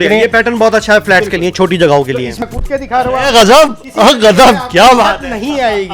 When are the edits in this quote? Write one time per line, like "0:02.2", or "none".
0:02.4

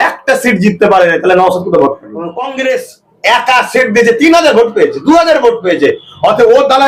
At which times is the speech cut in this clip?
0:02.4

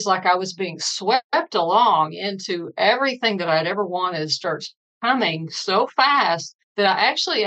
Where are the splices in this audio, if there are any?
0:06.6

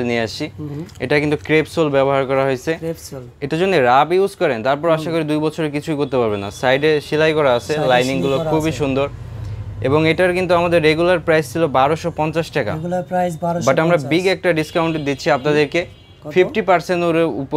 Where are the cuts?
none

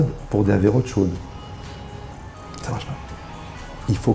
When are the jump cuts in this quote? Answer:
0:02.3

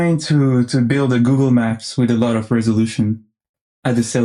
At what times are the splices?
none

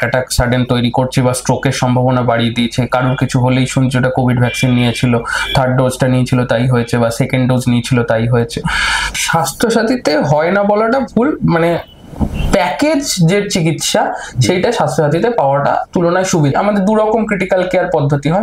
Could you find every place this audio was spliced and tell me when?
0:09.2
0:16.5

